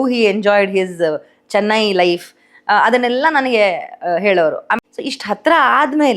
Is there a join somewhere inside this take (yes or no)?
yes